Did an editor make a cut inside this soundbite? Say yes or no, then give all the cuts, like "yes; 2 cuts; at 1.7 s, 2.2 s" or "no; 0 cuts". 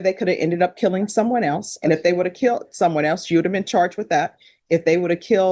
no; 0 cuts